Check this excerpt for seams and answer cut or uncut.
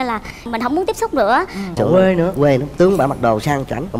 cut